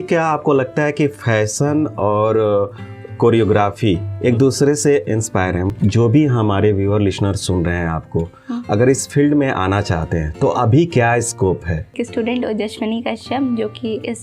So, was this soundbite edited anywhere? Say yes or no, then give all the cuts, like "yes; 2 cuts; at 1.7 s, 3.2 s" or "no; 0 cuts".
yes; 2 cuts; at 5.7 s, 11.9 s